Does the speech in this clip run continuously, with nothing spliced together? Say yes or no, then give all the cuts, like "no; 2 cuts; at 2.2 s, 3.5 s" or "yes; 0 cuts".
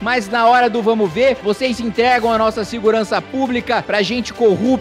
no; 1 cut; at 3.8 s